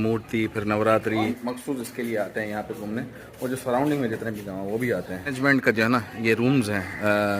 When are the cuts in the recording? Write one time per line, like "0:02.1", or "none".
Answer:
0:01.3
0:05.3